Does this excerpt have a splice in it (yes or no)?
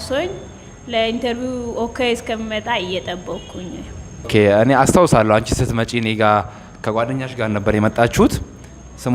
yes